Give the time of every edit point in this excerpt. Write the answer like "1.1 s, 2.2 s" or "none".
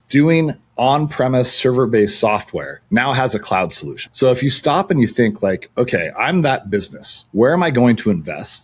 none